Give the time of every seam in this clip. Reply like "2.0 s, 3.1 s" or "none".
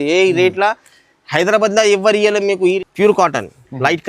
2.8 s

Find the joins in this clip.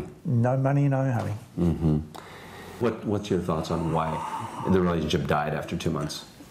2.8 s

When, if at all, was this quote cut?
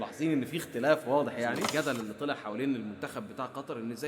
1.6 s

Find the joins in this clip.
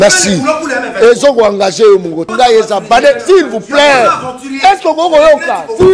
2.3 s

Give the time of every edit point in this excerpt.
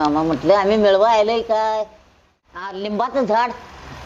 2.7 s

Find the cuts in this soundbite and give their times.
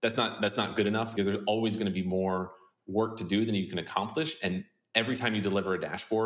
1.1 s

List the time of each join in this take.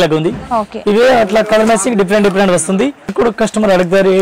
3.1 s

